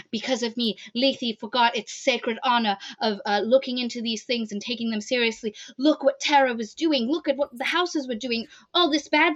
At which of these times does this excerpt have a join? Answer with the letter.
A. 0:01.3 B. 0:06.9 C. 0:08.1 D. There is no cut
D